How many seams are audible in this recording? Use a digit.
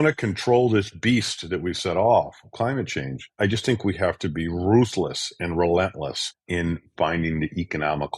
0